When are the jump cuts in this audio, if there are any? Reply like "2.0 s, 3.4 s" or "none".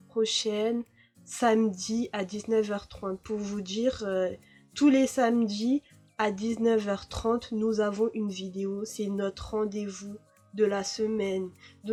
none